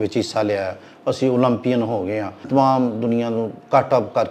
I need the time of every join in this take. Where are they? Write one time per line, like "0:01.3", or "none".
0:02.5